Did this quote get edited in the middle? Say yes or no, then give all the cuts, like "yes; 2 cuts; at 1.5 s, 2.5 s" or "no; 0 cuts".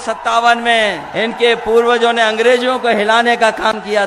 yes; 1 cut; at 1.0 s